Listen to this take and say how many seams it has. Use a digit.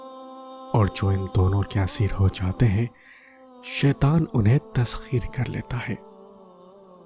1